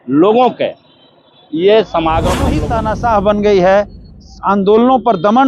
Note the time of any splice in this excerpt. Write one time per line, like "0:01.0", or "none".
0:02.6